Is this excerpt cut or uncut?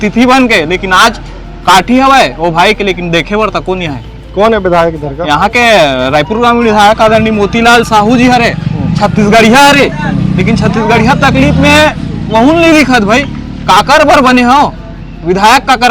uncut